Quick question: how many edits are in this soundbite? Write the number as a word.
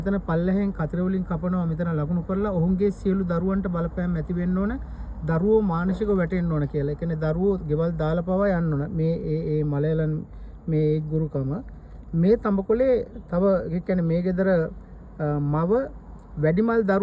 zero